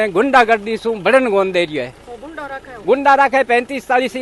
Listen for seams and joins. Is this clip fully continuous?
yes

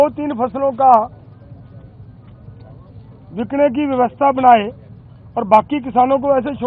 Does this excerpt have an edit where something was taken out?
no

